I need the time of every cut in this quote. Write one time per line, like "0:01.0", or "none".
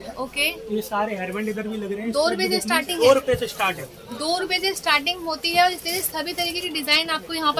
0:03.0